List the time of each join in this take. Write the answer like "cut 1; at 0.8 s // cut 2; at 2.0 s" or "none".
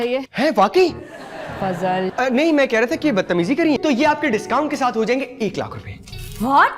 cut 1; at 3.8 s